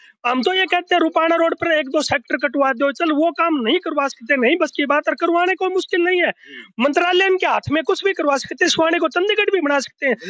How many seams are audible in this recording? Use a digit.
0